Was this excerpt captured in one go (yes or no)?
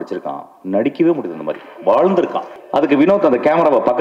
no